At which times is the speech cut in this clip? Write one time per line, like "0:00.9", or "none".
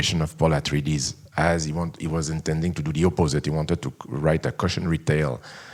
none